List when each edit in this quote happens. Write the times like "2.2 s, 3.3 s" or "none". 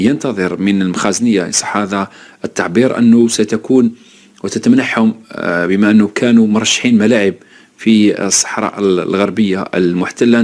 none